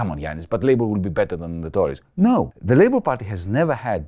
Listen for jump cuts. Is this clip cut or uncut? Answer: cut